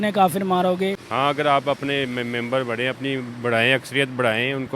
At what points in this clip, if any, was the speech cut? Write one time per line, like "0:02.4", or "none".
0:01.0